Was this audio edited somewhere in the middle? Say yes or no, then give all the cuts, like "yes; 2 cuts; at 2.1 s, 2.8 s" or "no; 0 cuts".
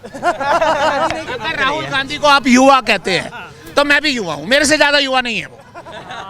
yes; 1 cut; at 1.2 s